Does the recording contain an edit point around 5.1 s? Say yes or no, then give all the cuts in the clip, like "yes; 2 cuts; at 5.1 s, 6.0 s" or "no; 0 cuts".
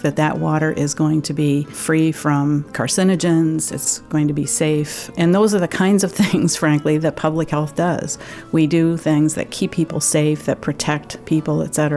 yes; 4 cuts; at 1.8 s, 2.8 s, 3.8 s, 5.1 s